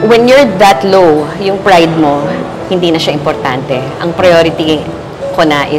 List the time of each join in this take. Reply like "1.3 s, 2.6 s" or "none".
none